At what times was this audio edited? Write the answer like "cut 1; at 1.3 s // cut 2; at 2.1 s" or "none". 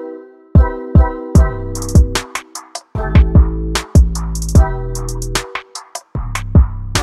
none